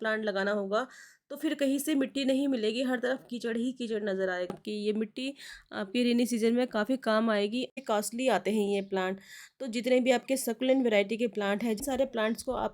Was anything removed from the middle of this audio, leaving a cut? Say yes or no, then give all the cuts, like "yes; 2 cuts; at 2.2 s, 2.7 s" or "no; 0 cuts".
yes; 3 cuts; at 4.5 s, 7.7 s, 11.8 s